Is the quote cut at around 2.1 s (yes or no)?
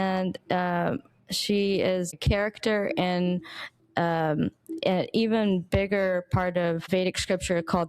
yes